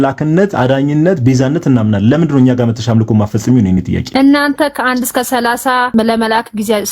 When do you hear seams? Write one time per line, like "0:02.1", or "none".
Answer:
0:04.0
0:05.9